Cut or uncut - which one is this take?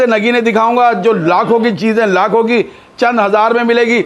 uncut